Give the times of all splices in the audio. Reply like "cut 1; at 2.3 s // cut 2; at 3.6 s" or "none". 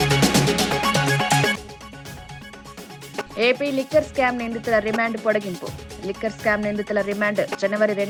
none